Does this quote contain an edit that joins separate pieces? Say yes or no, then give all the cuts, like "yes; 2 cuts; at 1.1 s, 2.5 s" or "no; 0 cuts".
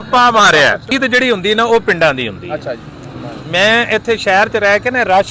yes; 1 cut; at 0.9 s